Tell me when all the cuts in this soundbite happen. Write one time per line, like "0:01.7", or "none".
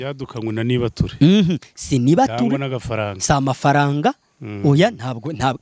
none